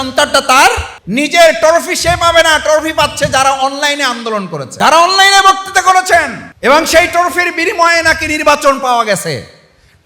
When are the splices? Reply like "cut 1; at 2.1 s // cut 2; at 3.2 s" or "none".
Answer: cut 1; at 0.9 s // cut 2; at 4.6 s // cut 3; at 6.4 s